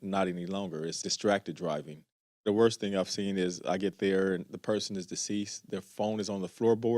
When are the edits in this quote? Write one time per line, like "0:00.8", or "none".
0:01.0
0:02.5